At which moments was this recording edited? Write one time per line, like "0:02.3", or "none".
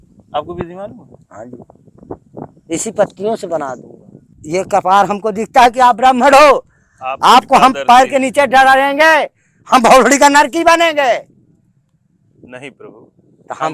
0:04.4